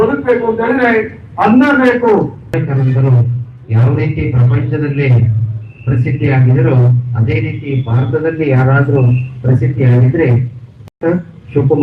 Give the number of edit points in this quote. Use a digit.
1